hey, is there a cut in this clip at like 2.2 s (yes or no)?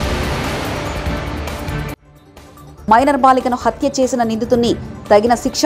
yes